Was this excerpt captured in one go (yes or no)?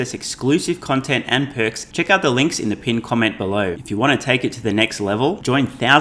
no